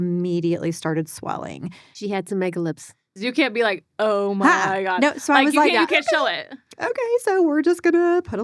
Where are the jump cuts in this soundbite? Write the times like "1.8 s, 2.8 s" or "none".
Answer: 1.9 s, 3.2 s